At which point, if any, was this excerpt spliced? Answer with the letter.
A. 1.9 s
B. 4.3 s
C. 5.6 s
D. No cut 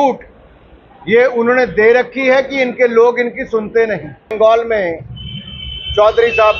B